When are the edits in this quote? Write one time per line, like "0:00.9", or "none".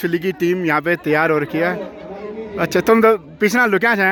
none